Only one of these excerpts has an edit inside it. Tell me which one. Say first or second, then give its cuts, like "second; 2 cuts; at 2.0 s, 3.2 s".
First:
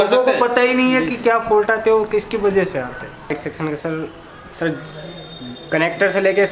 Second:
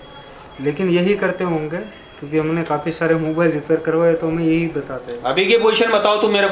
first; 1 cut; at 3.3 s